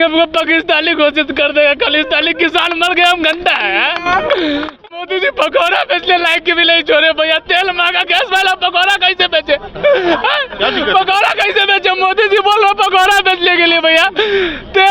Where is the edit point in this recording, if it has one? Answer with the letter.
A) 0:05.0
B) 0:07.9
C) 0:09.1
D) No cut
A